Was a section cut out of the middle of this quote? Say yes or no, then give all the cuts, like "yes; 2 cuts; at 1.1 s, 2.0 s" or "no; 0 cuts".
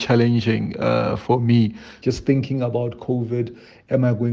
yes; 1 cut; at 1.9 s